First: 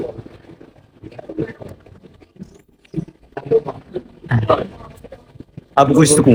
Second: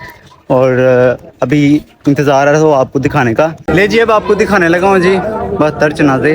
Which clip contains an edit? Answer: second; 1 cut; at 3.7 s

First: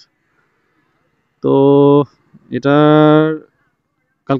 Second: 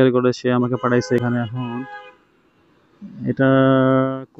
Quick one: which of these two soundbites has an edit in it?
second; 1 cut; at 1.2 s

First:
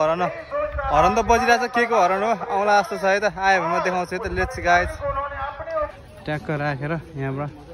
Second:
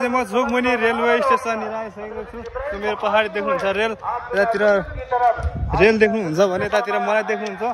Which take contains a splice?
first; 1 cut; at 5.9 s

